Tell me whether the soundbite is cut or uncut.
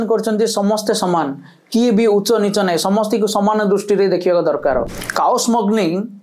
cut